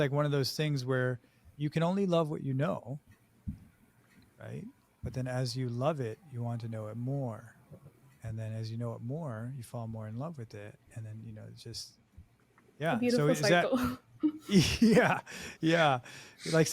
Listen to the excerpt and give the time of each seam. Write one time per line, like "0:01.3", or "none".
0:01.5